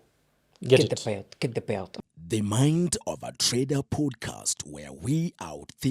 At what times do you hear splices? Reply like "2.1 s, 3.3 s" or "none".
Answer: 1.9 s

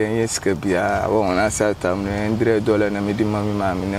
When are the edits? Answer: none

